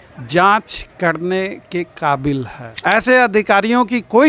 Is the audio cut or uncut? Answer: cut